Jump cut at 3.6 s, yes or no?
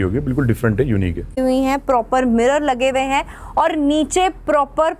no